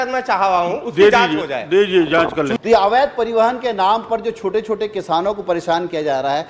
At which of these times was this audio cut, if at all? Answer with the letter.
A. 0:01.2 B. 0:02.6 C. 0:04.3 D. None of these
B